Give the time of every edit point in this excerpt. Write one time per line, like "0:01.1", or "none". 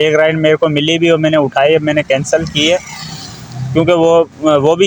none